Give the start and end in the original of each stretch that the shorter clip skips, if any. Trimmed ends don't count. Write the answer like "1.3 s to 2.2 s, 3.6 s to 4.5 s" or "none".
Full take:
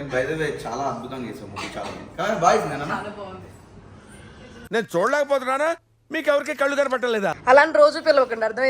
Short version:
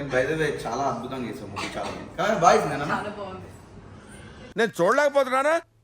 4.4 s to 4.6 s